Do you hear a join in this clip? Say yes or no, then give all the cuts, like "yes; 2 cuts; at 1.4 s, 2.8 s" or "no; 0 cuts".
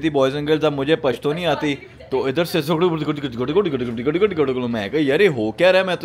no; 0 cuts